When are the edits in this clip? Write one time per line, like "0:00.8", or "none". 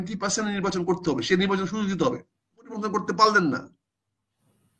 0:02.7